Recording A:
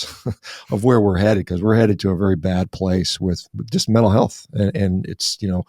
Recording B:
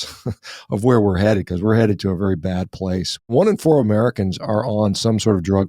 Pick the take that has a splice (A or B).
B